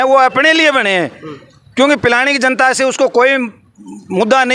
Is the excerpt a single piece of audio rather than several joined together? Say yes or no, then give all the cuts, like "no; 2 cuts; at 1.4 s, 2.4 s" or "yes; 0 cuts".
yes; 0 cuts